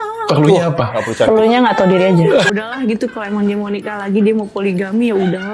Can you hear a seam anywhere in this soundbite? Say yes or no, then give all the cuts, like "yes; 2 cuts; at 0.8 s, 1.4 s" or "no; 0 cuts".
yes; 1 cut; at 2.5 s